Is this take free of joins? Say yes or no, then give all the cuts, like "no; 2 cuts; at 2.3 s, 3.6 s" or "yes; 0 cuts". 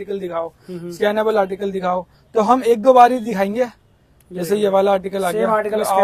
yes; 0 cuts